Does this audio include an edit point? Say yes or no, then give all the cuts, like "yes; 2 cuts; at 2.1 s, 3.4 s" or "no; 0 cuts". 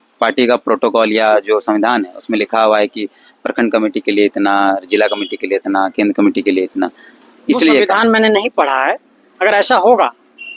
no; 0 cuts